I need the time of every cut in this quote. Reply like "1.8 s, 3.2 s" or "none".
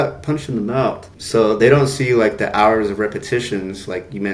1.1 s